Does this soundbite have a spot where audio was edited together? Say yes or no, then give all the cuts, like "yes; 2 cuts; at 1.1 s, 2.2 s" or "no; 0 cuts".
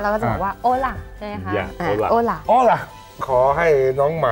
yes; 1 cut; at 3.2 s